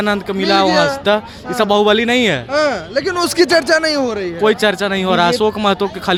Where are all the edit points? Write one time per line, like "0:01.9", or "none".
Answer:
none